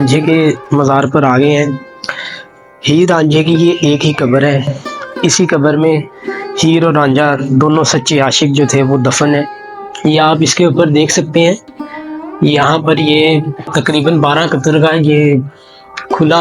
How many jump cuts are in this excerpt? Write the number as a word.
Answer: zero